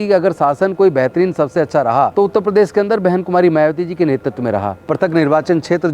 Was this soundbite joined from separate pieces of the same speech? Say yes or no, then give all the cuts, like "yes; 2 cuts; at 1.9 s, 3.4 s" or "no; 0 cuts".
yes; 2 cuts; at 2.1 s, 4.8 s